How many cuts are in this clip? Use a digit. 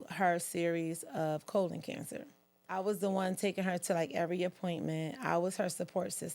1